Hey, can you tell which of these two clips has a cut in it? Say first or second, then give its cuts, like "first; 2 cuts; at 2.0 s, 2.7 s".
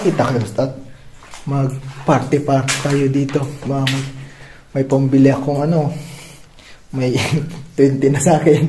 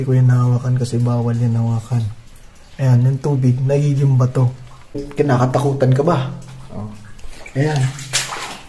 second; 1 cut; at 5.0 s